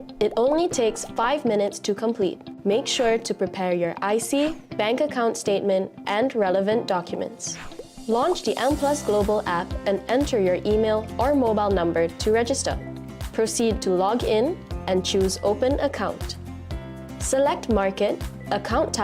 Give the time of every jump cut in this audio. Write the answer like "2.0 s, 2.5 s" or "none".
3.6 s

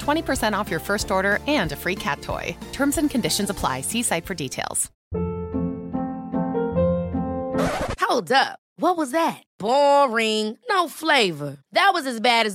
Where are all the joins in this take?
5.0 s

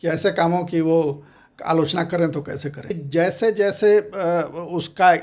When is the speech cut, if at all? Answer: 2.9 s

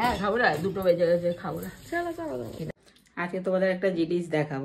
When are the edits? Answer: 2.7 s

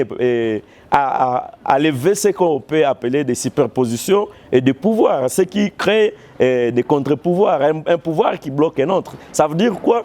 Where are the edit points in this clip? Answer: none

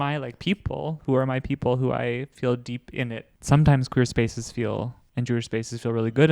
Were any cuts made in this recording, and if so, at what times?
3.3 s, 5.0 s

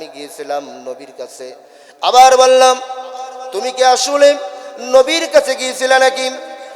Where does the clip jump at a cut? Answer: none

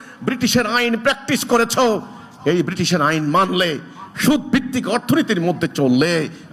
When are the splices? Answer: none

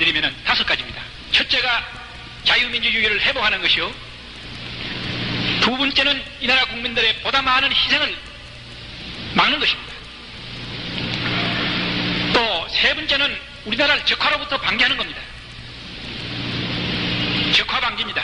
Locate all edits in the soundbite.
none

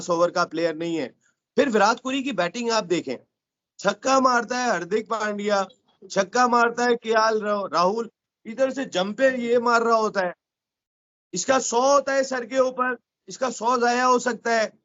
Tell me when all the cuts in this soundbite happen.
none

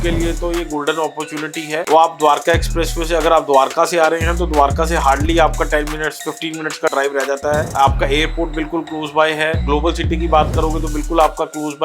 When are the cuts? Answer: 1.9 s

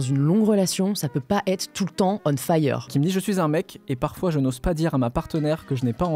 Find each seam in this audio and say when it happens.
2.9 s

